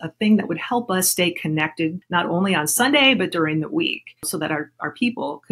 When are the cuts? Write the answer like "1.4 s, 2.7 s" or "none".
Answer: 2.0 s, 4.3 s